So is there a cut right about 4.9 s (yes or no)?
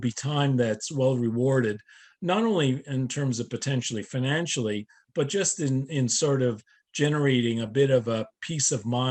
no